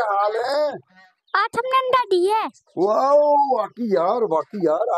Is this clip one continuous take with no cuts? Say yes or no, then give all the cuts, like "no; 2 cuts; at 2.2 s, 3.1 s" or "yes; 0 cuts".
yes; 0 cuts